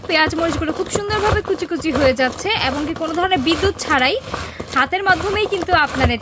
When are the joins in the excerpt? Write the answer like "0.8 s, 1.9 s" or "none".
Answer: none